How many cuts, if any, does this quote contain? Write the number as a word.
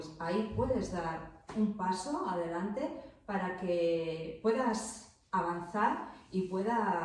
zero